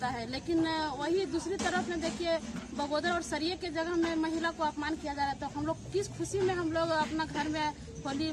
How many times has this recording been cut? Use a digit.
0